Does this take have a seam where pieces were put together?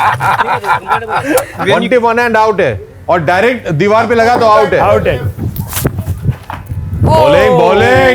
yes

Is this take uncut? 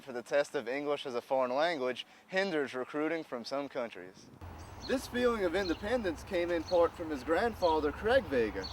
no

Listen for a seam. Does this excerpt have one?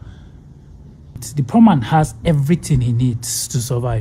yes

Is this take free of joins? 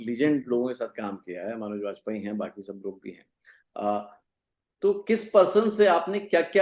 yes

